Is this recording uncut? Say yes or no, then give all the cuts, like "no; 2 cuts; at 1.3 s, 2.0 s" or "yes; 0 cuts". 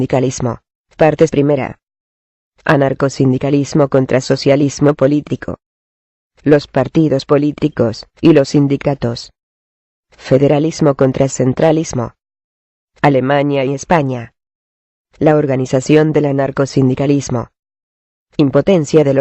no; 1 cut; at 3.4 s